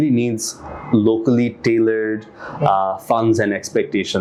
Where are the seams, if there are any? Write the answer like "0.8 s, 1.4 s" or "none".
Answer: none